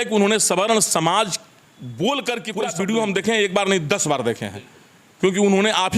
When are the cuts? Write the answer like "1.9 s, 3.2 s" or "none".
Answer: 2.5 s